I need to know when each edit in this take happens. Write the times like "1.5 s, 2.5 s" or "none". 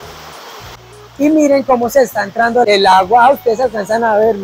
0.8 s, 2.6 s